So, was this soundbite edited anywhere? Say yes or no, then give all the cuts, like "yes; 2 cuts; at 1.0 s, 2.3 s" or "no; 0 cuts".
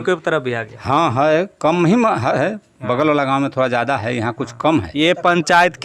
yes; 1 cut; at 4.9 s